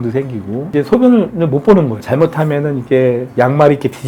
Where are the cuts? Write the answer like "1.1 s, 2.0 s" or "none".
2.0 s